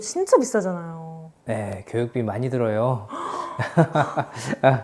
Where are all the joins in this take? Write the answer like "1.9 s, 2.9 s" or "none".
none